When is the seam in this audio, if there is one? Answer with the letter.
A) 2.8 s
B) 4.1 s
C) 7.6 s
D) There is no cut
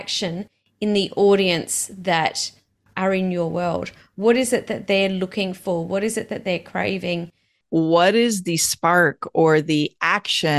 C